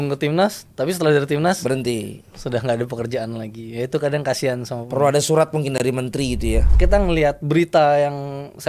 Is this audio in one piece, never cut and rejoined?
no; 1 cut; at 6.7 s

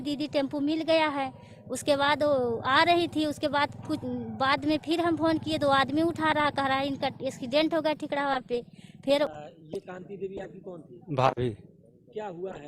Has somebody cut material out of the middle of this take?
yes; 1 cut; at 9.3 s

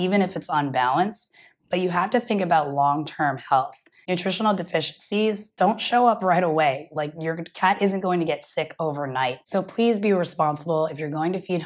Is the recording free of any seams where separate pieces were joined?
no; 1 cut; at 9.4 s

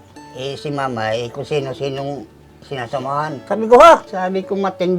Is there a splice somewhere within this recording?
yes; 2 cuts; at 3.4 s, 4.1 s

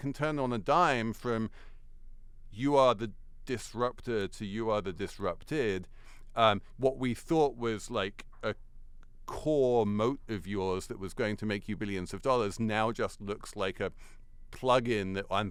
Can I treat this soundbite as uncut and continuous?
yes; 0 cuts

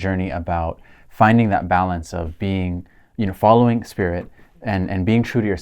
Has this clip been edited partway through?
no; 0 cuts

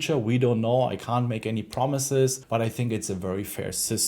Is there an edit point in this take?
yes; 1 cut; at 2.4 s

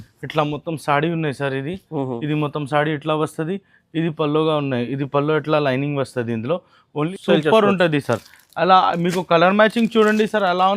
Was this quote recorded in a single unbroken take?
no; 1 cut; at 7.2 s

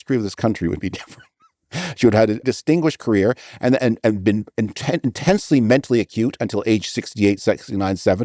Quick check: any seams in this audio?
yes; 1 cut; at 2.4 s

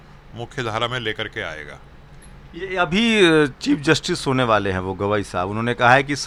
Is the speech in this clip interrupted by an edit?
no; 0 cuts

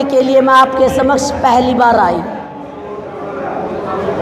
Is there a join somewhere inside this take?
yes; 1 cut; at 2.6 s

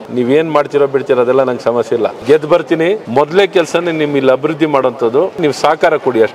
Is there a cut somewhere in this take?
yes; 3 cuts; at 2.2 s, 3.0 s, 5.4 s

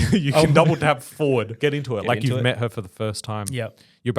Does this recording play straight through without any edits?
no; 1 cut; at 1.6 s

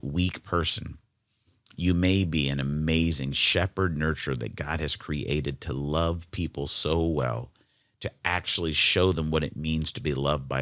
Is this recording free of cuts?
yes; 0 cuts

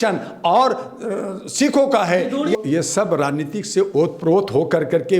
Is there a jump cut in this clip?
yes; 1 cut; at 2.5 s

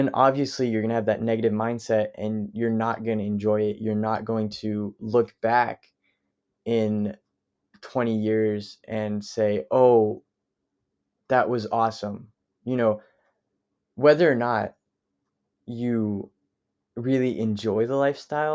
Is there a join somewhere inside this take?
no; 0 cuts

